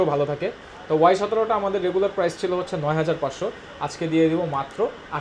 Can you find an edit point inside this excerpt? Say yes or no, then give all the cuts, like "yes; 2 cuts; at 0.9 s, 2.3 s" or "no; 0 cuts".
no; 0 cuts